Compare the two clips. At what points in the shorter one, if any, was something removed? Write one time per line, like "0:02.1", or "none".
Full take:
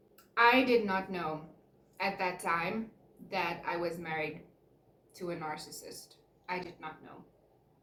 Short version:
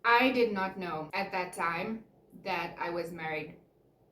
0:01.1

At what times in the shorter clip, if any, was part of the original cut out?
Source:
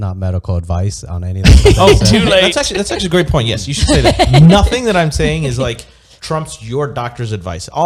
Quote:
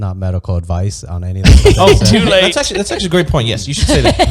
none

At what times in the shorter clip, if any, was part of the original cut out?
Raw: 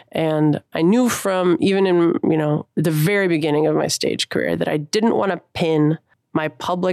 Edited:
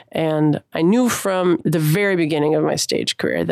0:01.6

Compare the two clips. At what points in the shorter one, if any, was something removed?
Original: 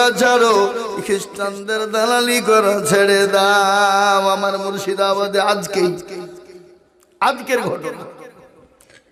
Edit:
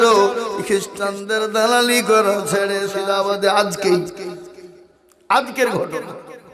0:02.8

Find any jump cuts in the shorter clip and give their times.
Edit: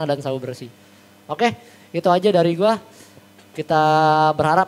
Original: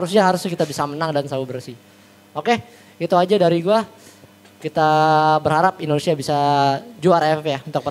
none

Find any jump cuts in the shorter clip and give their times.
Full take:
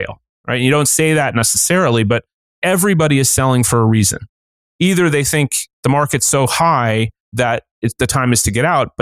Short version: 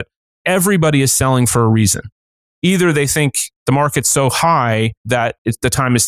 0:05.2

